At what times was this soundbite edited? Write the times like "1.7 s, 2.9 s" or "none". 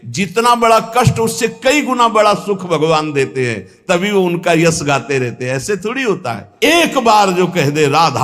6.4 s